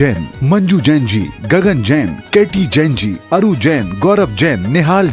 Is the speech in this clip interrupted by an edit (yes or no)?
no